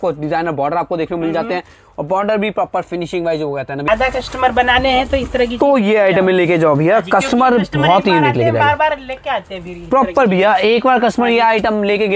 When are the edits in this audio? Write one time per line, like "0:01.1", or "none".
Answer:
0:03.9